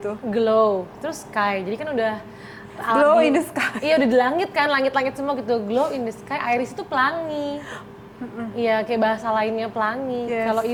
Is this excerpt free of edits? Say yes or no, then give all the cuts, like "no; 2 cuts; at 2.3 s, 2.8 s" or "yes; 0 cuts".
yes; 0 cuts